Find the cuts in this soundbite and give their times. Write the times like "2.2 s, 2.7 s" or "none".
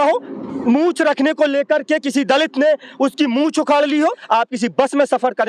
4.2 s